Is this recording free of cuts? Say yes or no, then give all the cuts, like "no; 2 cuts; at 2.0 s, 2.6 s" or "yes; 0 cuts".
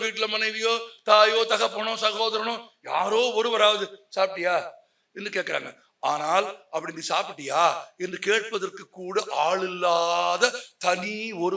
yes; 0 cuts